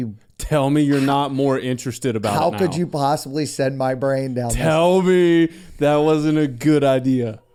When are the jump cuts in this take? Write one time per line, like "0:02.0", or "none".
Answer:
none